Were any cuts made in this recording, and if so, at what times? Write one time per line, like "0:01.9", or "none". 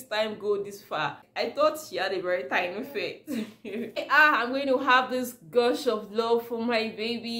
0:01.2
0:04.0